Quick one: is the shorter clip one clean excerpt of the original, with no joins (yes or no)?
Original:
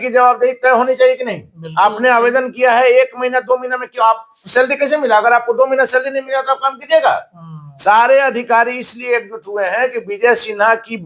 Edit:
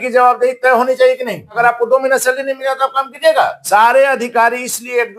no